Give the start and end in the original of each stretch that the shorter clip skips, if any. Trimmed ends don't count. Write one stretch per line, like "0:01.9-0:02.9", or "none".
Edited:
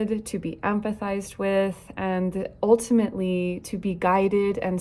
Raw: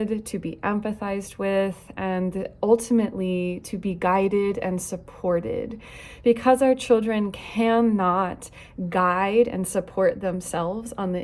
none